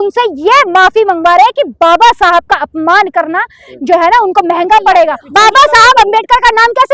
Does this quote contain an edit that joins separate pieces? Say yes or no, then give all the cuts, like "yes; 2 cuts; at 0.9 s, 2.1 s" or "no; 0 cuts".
yes; 1 cut; at 5.2 s